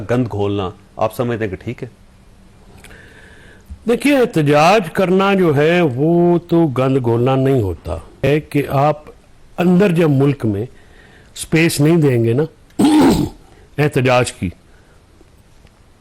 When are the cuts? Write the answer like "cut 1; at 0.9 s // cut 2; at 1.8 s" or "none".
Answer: cut 1; at 8.3 s